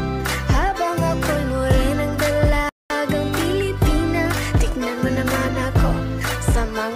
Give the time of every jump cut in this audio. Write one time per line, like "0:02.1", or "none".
none